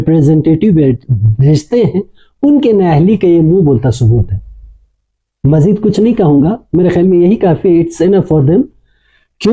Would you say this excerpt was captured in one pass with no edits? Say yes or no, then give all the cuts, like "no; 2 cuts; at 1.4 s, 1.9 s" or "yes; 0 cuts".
yes; 0 cuts